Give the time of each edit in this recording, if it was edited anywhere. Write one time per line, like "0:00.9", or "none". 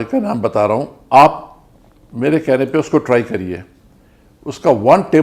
0:01.0